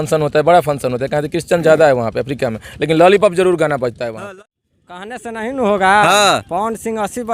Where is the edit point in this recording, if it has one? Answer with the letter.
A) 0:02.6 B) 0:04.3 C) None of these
B